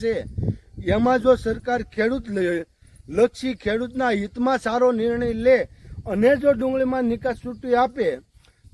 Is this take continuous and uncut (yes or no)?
yes